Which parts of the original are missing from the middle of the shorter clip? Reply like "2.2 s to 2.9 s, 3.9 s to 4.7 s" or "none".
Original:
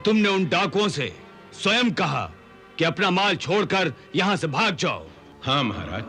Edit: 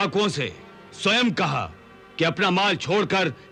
none